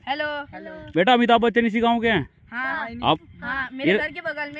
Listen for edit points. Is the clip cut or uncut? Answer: cut